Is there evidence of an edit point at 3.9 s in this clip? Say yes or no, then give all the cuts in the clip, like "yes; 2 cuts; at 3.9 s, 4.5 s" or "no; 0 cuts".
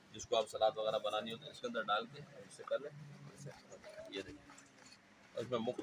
no; 0 cuts